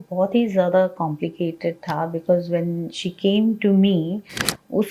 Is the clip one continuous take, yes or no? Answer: yes